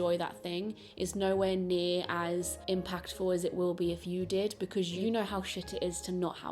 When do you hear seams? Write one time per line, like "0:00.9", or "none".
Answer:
0:02.5
0:05.0